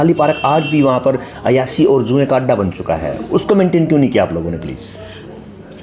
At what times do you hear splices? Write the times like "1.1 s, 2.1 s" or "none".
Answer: none